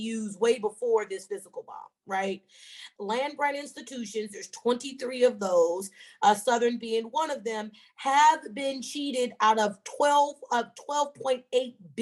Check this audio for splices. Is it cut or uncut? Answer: cut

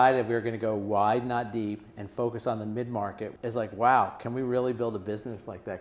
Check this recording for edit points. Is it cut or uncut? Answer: cut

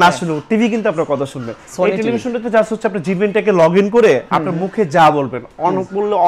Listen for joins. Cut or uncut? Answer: uncut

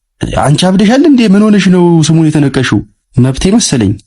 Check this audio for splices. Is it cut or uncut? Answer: cut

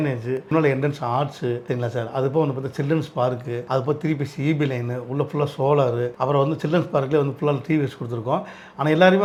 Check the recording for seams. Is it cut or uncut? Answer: uncut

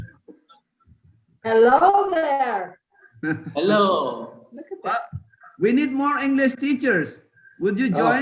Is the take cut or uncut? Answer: uncut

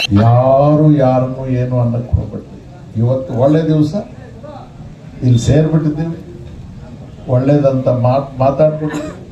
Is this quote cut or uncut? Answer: uncut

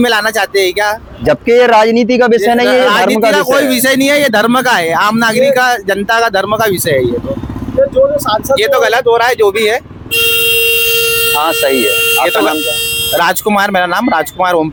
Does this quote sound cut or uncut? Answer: uncut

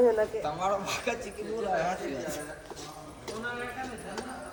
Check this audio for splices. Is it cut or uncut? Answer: uncut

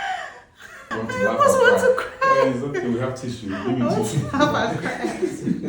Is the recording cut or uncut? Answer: cut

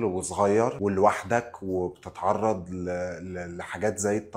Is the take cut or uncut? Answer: uncut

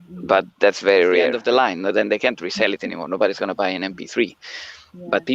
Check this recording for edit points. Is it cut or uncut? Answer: cut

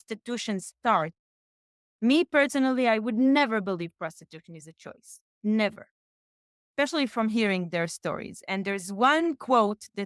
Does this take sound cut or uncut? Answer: uncut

